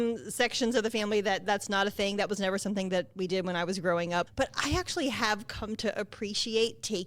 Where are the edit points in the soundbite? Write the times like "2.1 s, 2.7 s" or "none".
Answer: 4.3 s

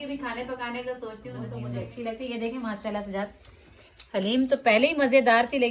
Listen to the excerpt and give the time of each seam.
1.5 s

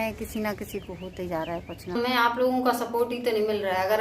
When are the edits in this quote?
2.0 s

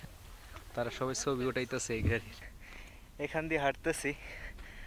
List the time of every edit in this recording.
2.3 s

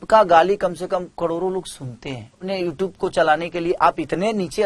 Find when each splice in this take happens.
2.4 s

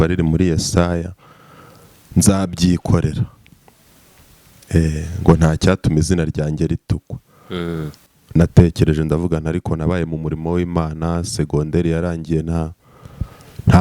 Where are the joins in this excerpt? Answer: 8.0 s

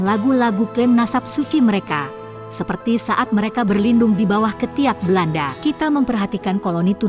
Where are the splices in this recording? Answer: 5.5 s

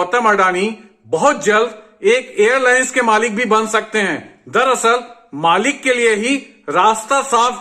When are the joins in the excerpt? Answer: none

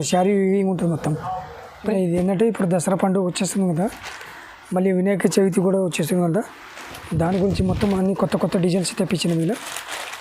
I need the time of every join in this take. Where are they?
1.9 s

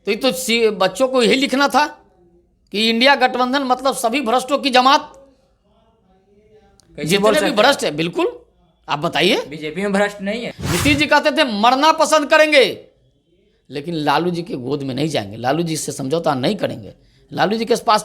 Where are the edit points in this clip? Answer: 10.5 s

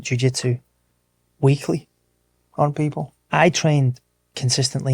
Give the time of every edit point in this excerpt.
3.2 s

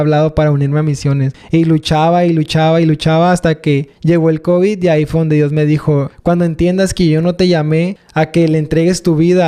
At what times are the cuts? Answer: 1.3 s, 3.9 s, 6.1 s, 8.0 s

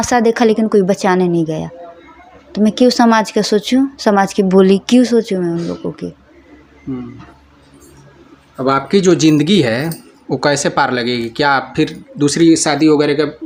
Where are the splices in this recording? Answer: none

